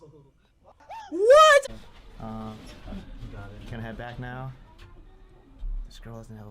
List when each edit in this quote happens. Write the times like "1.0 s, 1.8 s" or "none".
1.6 s

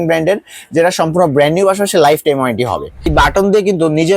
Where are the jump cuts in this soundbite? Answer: 3.1 s

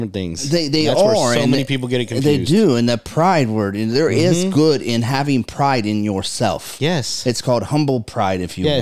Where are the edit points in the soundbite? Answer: none

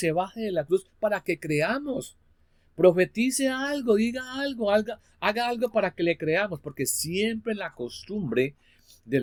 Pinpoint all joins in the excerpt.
none

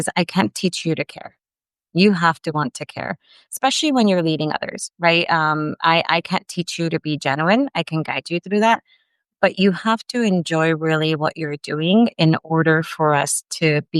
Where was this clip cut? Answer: none

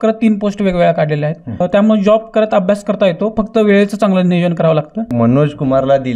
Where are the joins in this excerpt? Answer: 1.5 s, 5.1 s

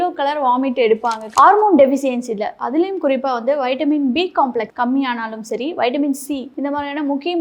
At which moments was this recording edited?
1.2 s

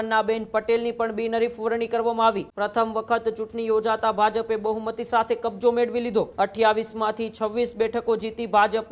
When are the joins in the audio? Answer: 2.5 s, 6.3 s

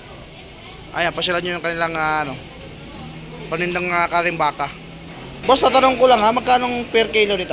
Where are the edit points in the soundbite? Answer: 5.3 s

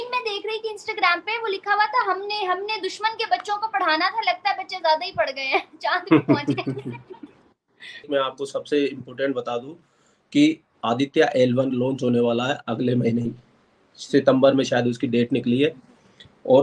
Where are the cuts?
8.1 s

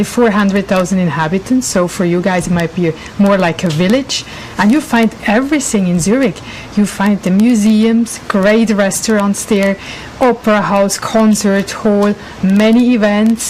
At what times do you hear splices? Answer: none

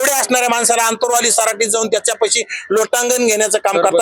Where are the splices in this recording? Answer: none

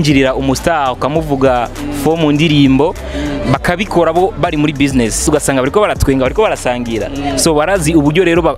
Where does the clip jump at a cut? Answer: 5.2 s

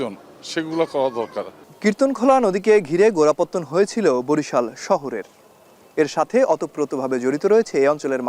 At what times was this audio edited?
none

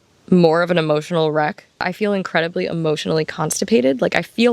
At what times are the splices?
1.9 s

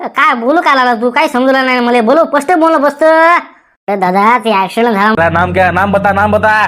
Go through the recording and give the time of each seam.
5.2 s

